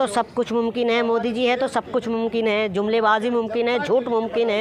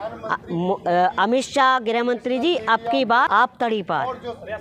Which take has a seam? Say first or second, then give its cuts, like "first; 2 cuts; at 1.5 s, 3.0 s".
second; 1 cut; at 3.3 s